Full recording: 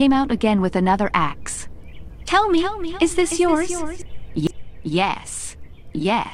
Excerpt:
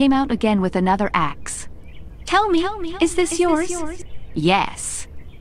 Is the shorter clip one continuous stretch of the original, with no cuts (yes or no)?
no